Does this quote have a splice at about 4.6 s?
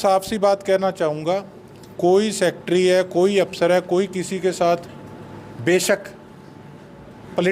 no; 0 cuts

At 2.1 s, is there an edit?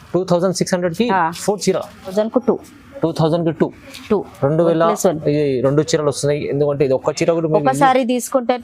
yes; 1 cut; at 2.1 s

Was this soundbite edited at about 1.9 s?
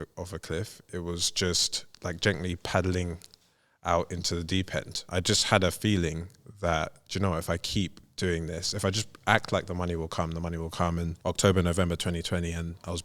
no; 2 cuts; at 5.0 s, 11.2 s

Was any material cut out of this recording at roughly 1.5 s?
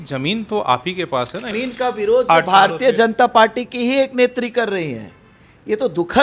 yes; 1 cut; at 1.5 s

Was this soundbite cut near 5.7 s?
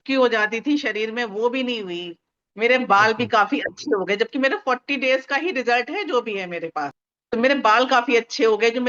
no; 1 cut; at 7.0 s

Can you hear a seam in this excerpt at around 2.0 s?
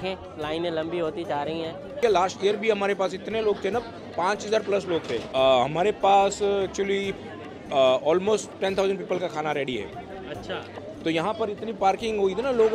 yes; 3 cuts; at 2.0 s, 5.3 s, 10.6 s

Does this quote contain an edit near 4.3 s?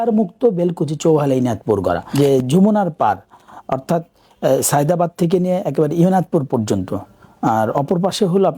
no; 1 cut; at 2.1 s

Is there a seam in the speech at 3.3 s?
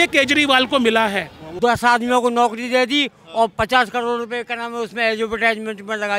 no; 1 cut; at 1.4 s

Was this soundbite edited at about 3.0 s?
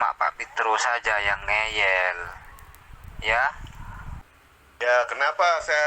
no; 1 cut; at 4.2 s

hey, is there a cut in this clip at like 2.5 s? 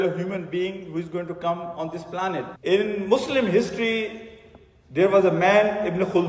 no; 0 cuts

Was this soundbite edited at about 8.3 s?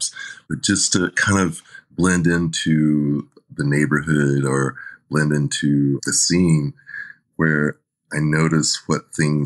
no; 1 cut; at 6.0 s

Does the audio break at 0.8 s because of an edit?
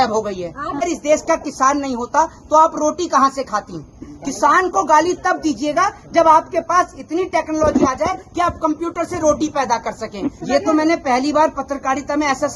yes; 2 cuts; at 0.8 s, 10.4 s

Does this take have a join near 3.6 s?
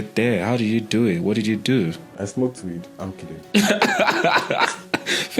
yes; 2 cuts; at 2.1 s, 3.6 s

